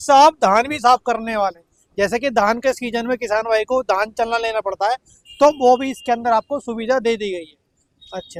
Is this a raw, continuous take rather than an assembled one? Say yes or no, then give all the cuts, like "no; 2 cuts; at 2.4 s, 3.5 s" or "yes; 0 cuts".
yes; 0 cuts